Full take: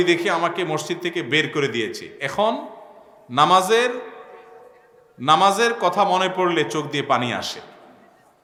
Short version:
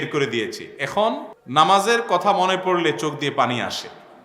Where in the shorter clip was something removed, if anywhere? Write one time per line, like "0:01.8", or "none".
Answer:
0:01.3